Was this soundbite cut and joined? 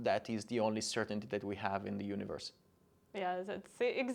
no; 0 cuts

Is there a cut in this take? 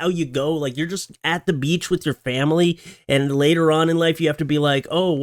no; 0 cuts

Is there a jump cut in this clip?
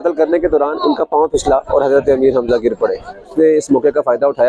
yes; 1 cut; at 3.3 s

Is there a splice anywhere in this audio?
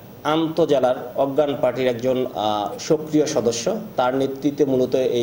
no; 0 cuts

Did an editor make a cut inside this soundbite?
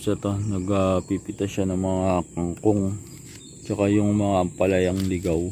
no; 0 cuts

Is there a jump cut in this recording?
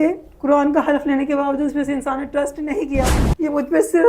yes; 1 cut; at 3.1 s

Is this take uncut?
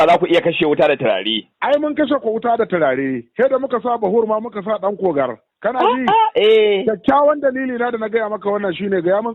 yes; 0 cuts

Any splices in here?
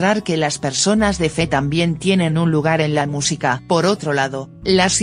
yes; 1 cut; at 3.0 s

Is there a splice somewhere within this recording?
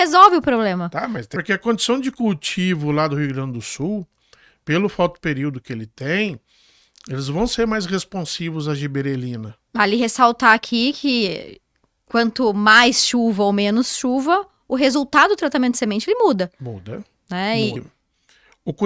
yes; 3 cuts; at 1.3 s, 9.7 s, 17.8 s

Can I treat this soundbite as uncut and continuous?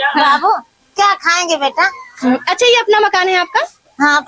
yes; 0 cuts

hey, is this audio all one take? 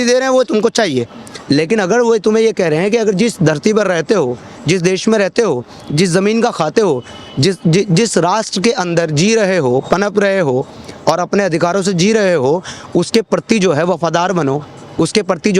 yes; 0 cuts

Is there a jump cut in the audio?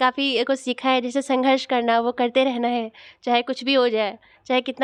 no; 0 cuts

